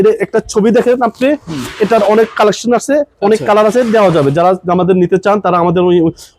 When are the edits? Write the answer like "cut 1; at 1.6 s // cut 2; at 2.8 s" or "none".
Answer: none

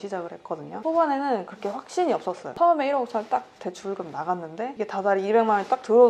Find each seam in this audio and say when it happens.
cut 1; at 0.8 s // cut 2; at 2.5 s

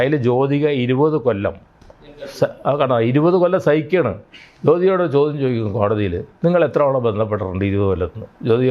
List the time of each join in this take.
none

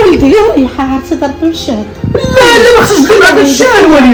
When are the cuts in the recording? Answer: none

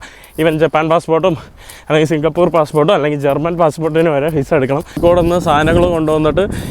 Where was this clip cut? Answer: cut 1; at 5.0 s

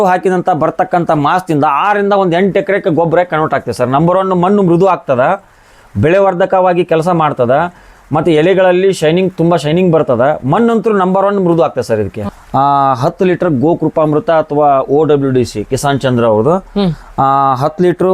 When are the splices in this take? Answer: cut 1; at 12.3 s

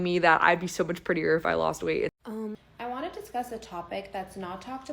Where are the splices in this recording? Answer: cut 1; at 2.1 s

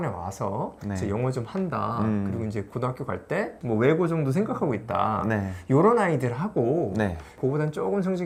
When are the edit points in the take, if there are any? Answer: none

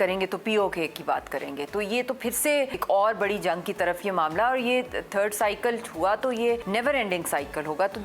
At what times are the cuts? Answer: cut 1; at 2.8 s // cut 2; at 6.6 s

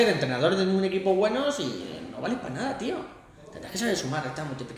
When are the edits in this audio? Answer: none

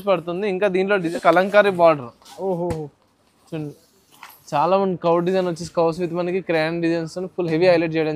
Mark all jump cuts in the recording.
cut 1; at 1.1 s

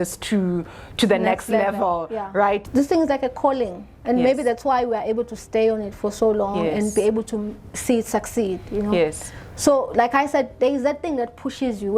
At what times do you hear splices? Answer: cut 1; at 2.7 s

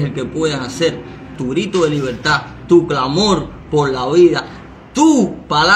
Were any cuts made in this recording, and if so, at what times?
cut 1; at 1.3 s

